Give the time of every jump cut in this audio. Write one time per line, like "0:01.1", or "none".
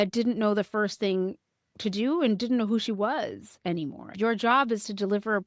0:04.1